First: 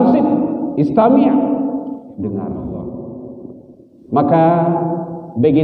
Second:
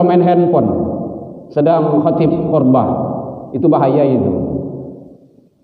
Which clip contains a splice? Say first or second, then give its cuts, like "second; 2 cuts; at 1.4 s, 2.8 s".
first; 1 cut; at 2.9 s